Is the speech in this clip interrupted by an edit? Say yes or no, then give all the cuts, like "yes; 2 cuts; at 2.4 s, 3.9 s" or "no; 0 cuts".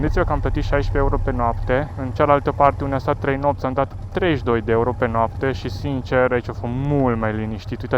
no; 0 cuts